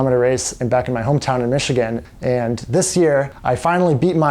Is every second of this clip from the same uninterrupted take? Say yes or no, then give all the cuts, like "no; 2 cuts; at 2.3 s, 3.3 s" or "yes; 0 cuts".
no; 2 cuts; at 2.1 s, 3.3 s